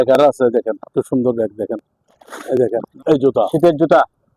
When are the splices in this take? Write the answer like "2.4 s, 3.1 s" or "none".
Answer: 2.9 s

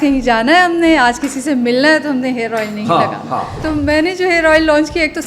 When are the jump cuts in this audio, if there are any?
3.6 s

